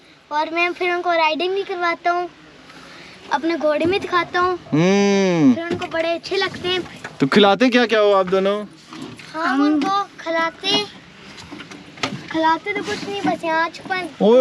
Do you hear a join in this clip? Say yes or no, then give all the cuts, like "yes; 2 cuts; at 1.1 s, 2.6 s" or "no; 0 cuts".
no; 0 cuts